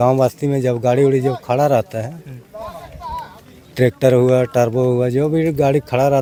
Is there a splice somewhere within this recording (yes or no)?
no